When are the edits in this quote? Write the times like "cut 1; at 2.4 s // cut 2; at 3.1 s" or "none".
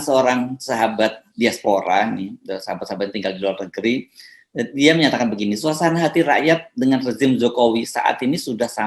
none